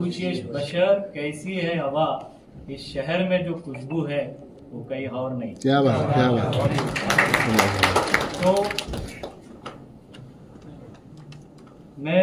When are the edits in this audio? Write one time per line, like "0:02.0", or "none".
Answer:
none